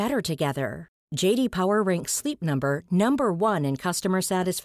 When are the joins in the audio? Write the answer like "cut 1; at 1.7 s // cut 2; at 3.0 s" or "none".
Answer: none